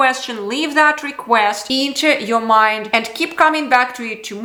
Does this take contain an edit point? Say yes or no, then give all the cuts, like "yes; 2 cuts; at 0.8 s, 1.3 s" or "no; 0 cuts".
no; 0 cuts